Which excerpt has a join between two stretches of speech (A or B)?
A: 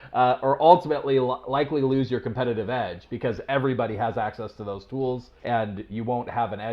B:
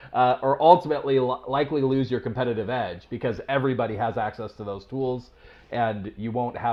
A